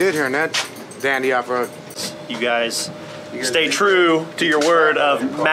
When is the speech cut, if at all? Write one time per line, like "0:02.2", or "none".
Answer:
0:02.0